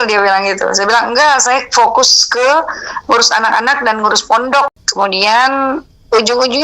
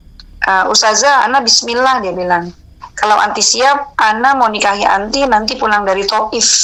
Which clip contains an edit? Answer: first; 1 cut; at 4.7 s

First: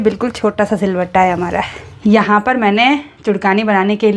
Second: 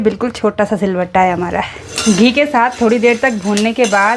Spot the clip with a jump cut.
second; 1 cut; at 1.8 s

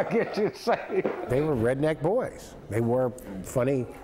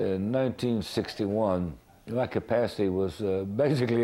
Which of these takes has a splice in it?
first; 1 cut; at 1.2 s

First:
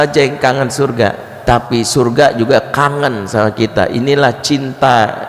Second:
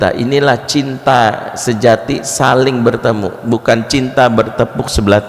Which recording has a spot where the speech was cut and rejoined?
first; 1 cut; at 1.3 s

